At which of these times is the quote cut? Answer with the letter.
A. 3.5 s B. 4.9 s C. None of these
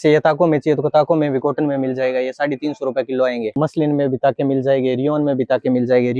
A